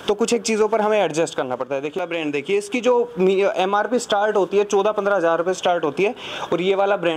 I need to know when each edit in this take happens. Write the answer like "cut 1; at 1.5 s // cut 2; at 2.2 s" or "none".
cut 1; at 1.9 s

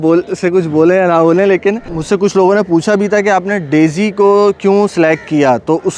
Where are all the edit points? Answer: cut 1; at 1.9 s

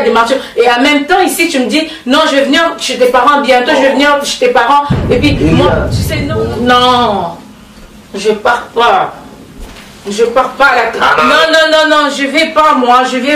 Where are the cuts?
cut 1; at 6.0 s

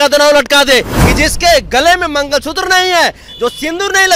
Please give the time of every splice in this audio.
cut 1; at 1.0 s

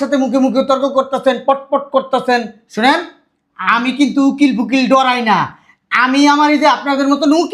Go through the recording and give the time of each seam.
none

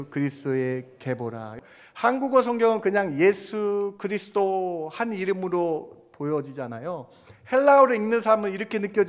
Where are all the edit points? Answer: cut 1; at 1.5 s

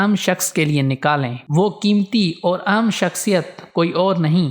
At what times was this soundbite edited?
cut 1; at 1.4 s

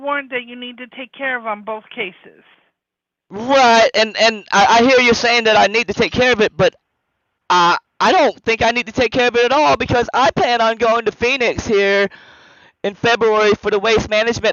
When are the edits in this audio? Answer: none

